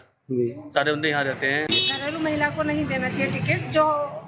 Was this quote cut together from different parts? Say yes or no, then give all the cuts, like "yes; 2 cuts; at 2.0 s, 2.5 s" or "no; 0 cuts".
yes; 1 cut; at 1.7 s